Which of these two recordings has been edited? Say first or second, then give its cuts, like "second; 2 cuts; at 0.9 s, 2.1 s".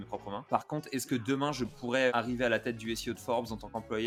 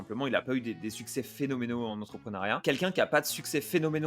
second; 1 cut; at 2.5 s